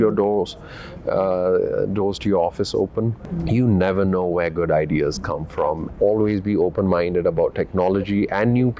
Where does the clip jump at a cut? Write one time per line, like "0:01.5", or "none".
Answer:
0:03.2
0:05.8

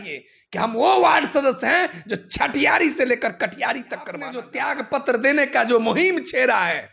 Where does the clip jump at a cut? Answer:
0:04.5

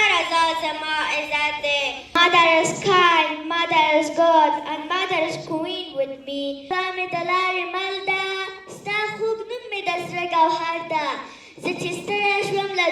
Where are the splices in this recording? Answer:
0:02.2
0:06.7

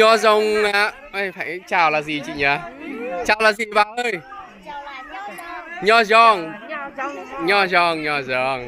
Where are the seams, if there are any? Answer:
none

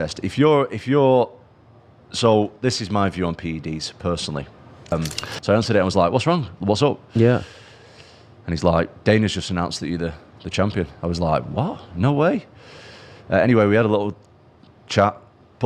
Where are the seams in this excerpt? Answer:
0:04.9

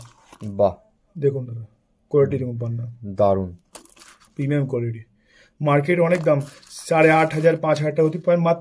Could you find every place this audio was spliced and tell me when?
none

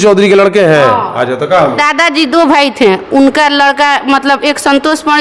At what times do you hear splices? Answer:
0:01.8

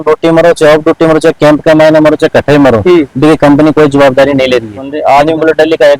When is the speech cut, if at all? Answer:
0:05.0

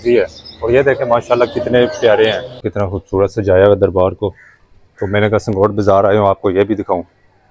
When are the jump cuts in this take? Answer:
0:02.7

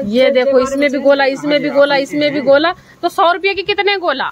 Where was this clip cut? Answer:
none

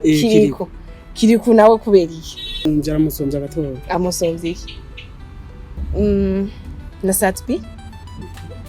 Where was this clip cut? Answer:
0:02.7
0:05.9

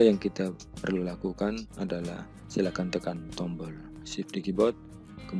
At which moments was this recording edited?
none

